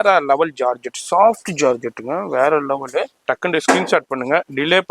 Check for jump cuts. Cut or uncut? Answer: cut